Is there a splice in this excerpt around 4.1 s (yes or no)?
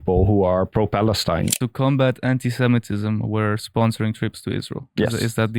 no